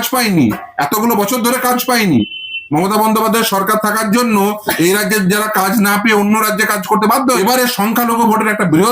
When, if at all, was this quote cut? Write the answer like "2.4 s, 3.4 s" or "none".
7.4 s